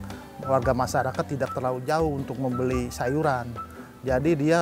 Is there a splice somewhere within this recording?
no; 0 cuts

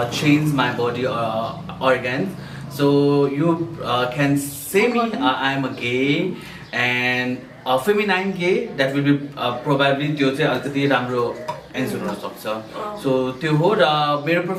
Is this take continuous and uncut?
yes; 0 cuts

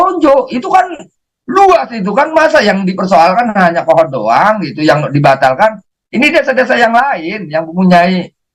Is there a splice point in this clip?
no; 0 cuts

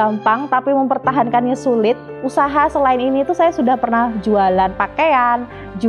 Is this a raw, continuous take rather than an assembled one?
no; 1 cut; at 2.1 s

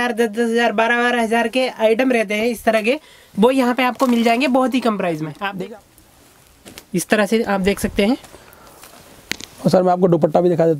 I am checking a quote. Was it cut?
yes; 1 cut; at 5.6 s

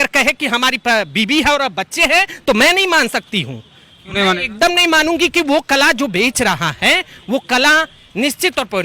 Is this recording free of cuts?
yes; 0 cuts

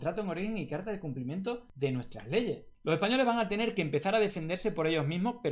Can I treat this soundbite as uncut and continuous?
no; 2 cuts; at 1.7 s, 2.7 s

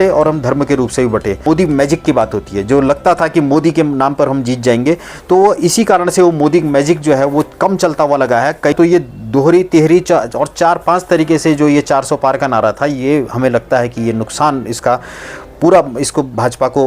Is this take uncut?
no; 2 cuts; at 1.4 s, 8.7 s

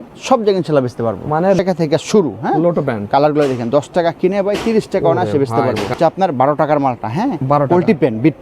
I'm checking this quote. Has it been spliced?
yes; 2 cuts; at 1.6 s, 6.0 s

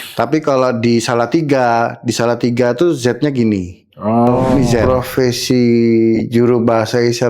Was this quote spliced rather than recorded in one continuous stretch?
yes; 1 cut; at 4.8 s

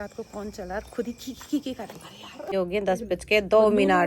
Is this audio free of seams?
no; 1 cut; at 2.3 s

